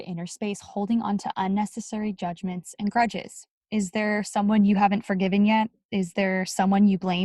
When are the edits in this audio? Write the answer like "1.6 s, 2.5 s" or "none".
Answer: 5.8 s